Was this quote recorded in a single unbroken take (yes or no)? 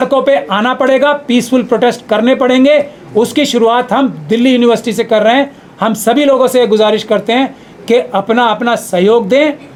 yes